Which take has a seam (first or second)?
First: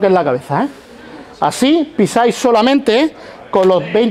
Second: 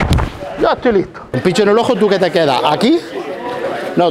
second